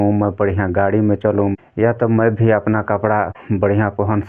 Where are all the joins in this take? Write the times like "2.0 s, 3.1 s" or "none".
1.5 s, 3.4 s